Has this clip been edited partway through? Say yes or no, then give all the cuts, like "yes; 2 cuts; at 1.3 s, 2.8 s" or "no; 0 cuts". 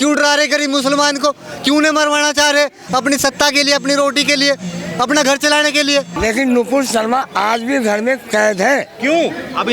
yes; 1 cut; at 6.1 s